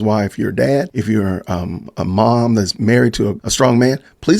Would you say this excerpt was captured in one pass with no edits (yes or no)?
no